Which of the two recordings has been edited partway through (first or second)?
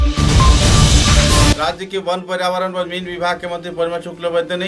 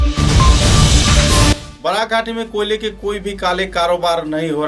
second